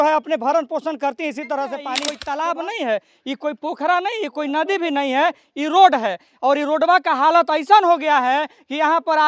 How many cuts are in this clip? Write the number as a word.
one